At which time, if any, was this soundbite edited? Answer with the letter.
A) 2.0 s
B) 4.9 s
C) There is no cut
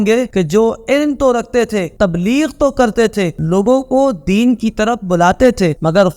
C